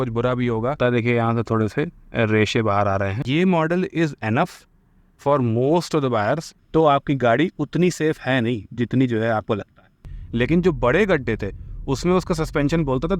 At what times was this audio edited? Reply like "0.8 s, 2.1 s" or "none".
0.8 s, 3.2 s, 6.5 s, 10.0 s